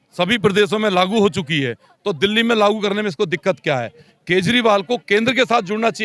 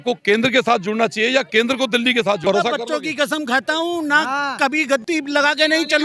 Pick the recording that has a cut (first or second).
second